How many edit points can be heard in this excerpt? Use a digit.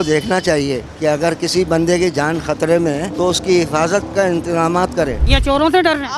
3